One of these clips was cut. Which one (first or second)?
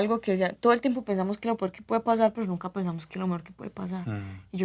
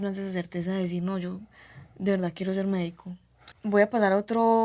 second